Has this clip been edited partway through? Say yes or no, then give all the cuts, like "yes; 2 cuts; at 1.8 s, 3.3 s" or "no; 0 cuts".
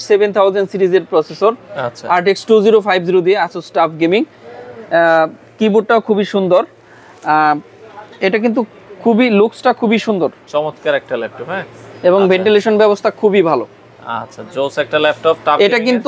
no; 0 cuts